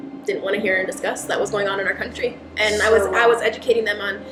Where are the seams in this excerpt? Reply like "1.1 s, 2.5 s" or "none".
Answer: none

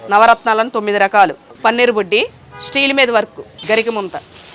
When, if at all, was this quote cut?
1.5 s, 3.5 s

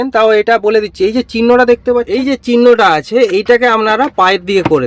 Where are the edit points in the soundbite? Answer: 2.1 s

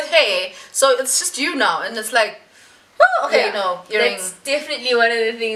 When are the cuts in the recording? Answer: none

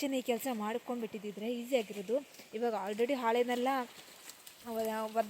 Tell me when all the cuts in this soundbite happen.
none

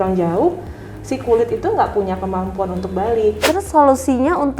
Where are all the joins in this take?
3.4 s

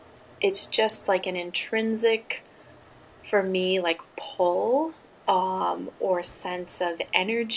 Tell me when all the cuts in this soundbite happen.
none

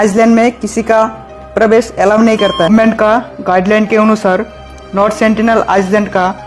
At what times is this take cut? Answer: 2.7 s

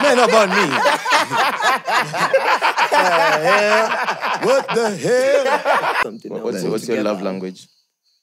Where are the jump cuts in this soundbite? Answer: 6.0 s

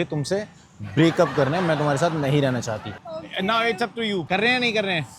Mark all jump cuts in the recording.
2.9 s, 4.3 s

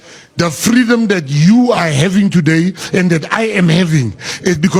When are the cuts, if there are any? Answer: none

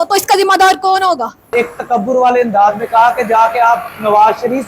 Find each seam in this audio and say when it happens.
1.5 s

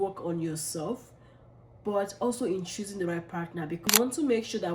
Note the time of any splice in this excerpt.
3.8 s

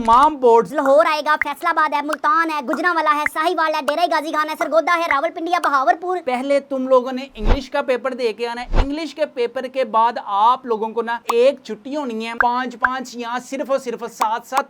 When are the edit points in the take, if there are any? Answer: 6.2 s, 12.3 s

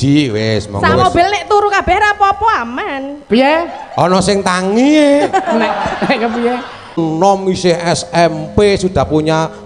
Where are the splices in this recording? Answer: 7.0 s

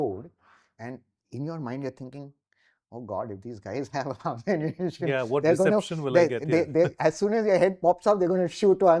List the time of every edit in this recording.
none

